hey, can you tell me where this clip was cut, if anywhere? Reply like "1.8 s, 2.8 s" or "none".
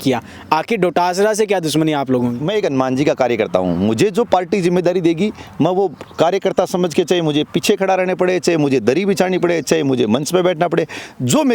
2.4 s